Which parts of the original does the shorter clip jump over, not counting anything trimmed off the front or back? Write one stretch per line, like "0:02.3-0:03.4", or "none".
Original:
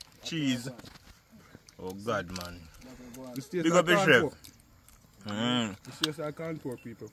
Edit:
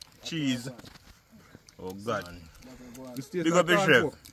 0:02.3-0:02.5